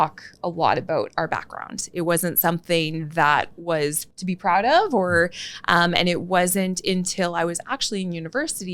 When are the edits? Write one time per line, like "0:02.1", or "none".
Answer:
0:04.1